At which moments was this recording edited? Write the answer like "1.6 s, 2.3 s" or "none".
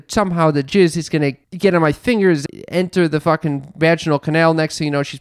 1.4 s, 2.4 s